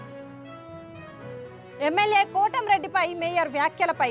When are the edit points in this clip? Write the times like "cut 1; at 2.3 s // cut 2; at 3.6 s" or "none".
cut 1; at 1.2 s